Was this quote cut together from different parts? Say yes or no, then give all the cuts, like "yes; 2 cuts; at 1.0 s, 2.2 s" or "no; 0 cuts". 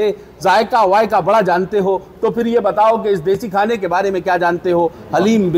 no; 0 cuts